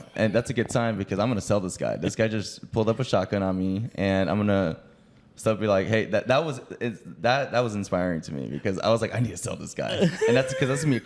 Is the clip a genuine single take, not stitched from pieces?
yes; 0 cuts

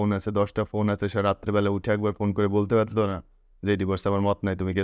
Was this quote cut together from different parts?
no; 0 cuts

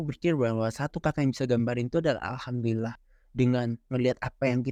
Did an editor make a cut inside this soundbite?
no; 0 cuts

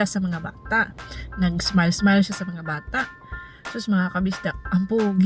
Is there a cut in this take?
no; 0 cuts

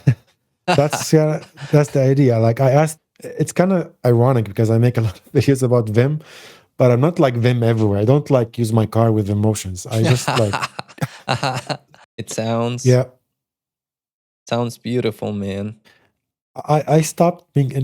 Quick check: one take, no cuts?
no; 2 cuts; at 3.0 s, 11.9 s

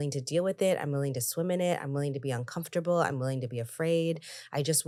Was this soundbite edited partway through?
no; 0 cuts

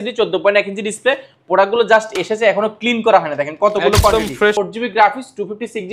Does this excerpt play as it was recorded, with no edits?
no; 1 cut; at 4.6 s

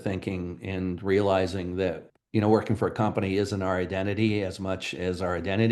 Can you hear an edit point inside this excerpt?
yes; 1 cut; at 2.1 s

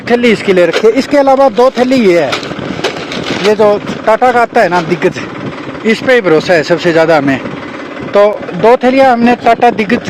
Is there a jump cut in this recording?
no; 0 cuts

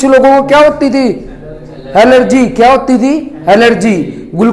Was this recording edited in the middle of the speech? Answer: no; 0 cuts

